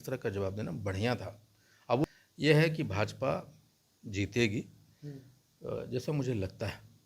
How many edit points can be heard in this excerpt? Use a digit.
1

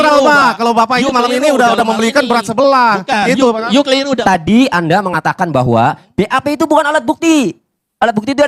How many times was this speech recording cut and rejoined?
1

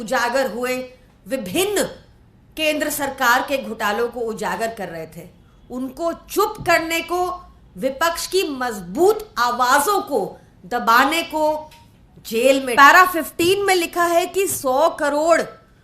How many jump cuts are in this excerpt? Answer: 1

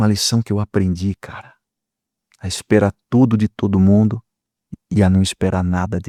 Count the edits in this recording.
0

